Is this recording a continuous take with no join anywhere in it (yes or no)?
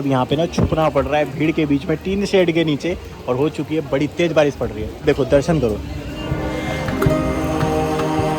yes